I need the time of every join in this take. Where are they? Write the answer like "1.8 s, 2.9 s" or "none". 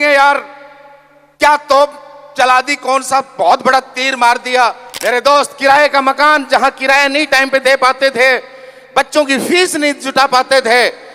4.9 s